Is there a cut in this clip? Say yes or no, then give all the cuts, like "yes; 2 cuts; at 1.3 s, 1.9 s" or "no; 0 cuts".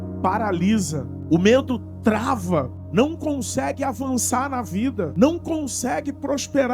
yes; 3 cuts; at 1.1 s, 2.8 s, 5.1 s